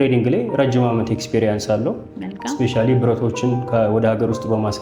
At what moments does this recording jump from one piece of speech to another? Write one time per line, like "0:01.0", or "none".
none